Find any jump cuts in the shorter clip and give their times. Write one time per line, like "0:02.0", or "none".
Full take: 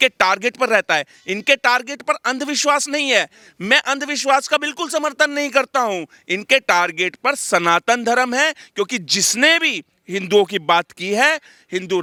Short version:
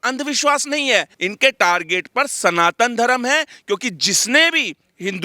0:01.2